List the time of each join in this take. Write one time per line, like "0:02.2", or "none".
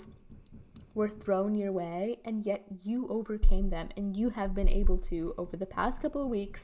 none